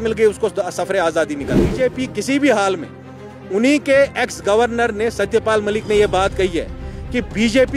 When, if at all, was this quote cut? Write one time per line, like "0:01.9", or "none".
0:01.7